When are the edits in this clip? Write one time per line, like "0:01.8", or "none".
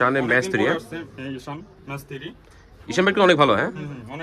none